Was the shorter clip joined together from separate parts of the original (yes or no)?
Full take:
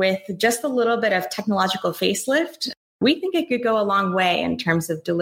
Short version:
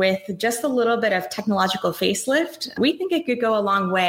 yes